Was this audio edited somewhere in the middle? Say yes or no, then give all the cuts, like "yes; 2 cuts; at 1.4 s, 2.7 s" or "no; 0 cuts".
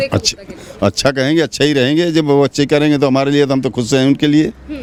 no; 0 cuts